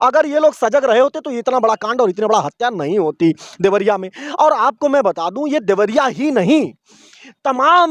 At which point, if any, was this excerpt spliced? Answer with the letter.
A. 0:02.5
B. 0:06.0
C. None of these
C